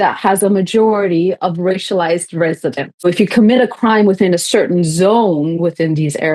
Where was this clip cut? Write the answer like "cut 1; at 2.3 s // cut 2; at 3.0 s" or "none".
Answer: cut 1; at 3.0 s